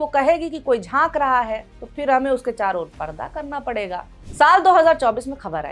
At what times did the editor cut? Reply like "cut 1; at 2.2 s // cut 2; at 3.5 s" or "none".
cut 1; at 4.2 s